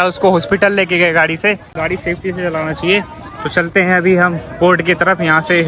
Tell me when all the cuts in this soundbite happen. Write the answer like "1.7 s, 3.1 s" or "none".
none